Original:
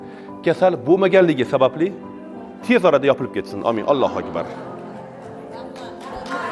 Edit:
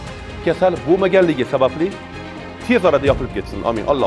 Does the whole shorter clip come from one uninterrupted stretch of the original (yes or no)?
yes